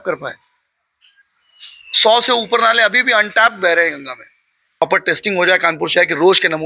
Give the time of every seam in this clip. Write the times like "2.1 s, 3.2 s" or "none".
4.8 s